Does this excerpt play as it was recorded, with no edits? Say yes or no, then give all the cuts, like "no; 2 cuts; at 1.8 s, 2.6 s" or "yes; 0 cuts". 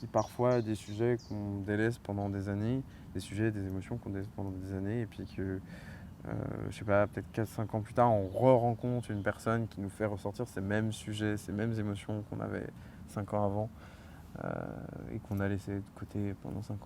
yes; 0 cuts